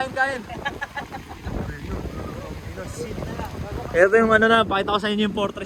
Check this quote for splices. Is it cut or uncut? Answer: uncut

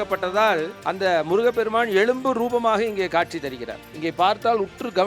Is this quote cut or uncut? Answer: uncut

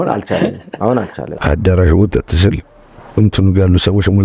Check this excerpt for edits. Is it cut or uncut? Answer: cut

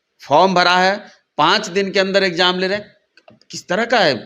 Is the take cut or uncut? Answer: uncut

